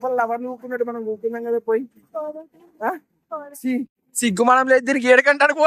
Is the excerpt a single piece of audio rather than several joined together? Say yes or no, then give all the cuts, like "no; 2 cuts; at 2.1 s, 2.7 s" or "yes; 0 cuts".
yes; 0 cuts